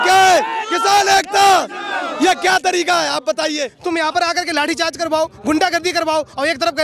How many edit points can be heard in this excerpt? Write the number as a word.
one